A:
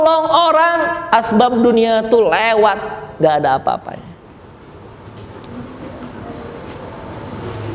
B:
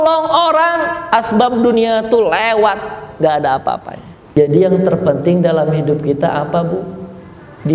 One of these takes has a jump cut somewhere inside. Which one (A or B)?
B